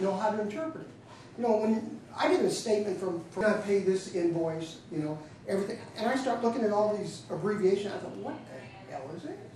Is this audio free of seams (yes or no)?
no